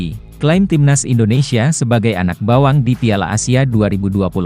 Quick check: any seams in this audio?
no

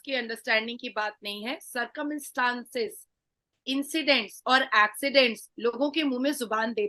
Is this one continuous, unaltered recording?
yes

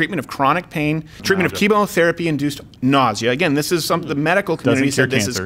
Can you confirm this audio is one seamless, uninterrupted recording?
no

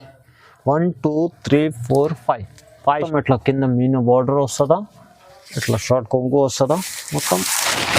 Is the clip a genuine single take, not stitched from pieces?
no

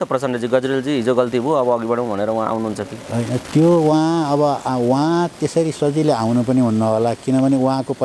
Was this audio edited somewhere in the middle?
no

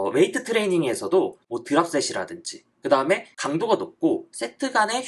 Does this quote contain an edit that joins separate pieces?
no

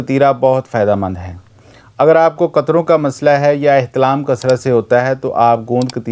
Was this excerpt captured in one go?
yes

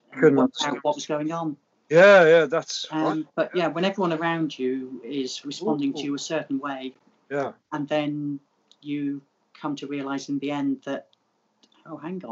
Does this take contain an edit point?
no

